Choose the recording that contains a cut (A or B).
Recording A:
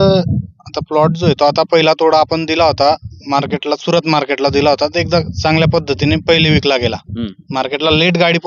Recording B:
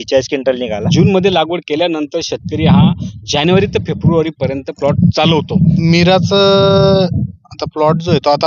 B